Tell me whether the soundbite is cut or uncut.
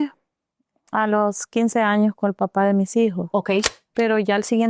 cut